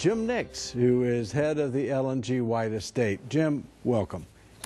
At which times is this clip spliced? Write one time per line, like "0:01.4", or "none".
none